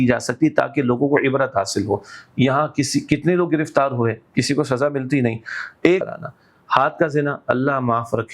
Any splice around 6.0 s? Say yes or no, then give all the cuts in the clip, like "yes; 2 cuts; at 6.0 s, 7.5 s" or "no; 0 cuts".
yes; 1 cut; at 6.0 s